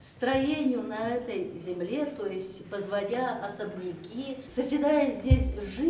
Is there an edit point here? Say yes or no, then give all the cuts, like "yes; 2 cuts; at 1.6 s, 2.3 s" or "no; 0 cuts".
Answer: yes; 1 cut; at 4.4 s